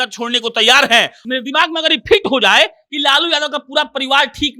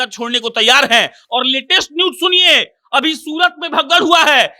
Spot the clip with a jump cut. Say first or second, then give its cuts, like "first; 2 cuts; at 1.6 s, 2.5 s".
first; 1 cut; at 1.2 s